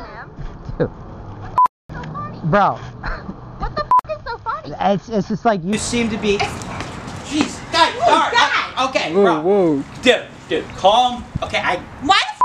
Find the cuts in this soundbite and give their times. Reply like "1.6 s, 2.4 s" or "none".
none